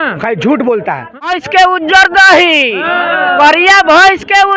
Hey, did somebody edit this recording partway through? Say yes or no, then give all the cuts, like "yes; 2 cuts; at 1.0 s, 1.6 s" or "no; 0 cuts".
yes; 1 cut; at 1.3 s